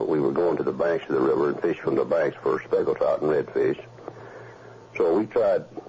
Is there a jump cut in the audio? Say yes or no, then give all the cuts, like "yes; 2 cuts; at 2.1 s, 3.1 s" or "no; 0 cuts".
yes; 1 cut; at 2.2 s